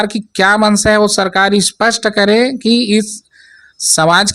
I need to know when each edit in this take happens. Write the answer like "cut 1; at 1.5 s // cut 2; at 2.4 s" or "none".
none